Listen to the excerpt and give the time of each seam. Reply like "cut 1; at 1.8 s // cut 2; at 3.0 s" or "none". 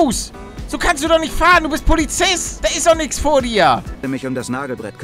cut 1; at 2.5 s // cut 2; at 4.0 s

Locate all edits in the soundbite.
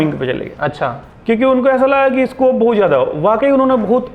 none

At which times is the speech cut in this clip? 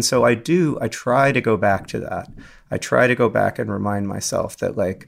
none

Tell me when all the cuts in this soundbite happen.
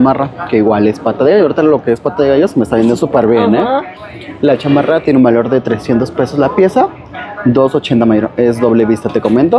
none

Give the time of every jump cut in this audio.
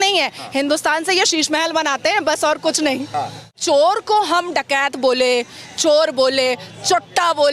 cut 1; at 3.6 s

